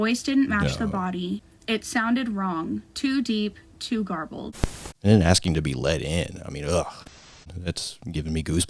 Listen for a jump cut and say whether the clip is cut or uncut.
cut